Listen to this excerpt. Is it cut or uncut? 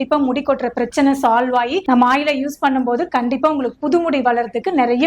cut